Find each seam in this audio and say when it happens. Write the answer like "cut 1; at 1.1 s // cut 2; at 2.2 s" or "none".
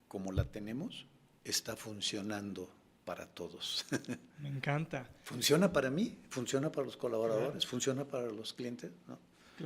none

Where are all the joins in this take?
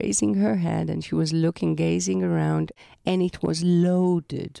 cut 1; at 2.7 s

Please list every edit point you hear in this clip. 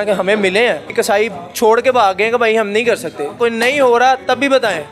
cut 1; at 0.9 s // cut 2; at 3.3 s

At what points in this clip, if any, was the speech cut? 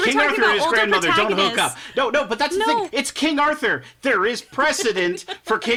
none

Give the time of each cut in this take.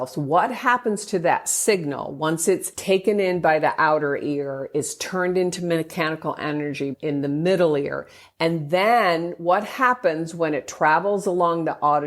cut 1; at 2.7 s // cut 2; at 6.9 s

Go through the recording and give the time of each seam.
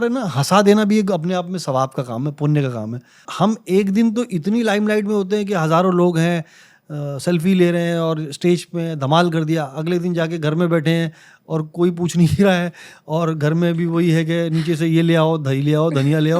cut 1; at 3.3 s

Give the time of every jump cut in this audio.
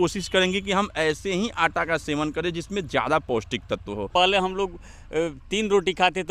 cut 1; at 4.1 s

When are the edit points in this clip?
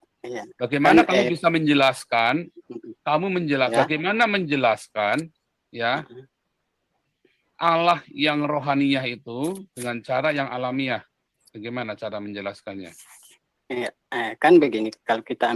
none

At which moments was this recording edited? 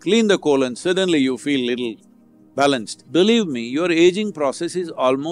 cut 1; at 2.9 s

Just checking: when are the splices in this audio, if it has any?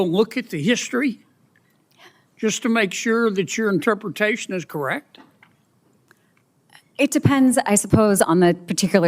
cut 1; at 6.1 s

